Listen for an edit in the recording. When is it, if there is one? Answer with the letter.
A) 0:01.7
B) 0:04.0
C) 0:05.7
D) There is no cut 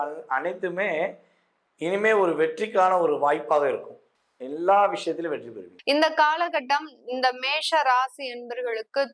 C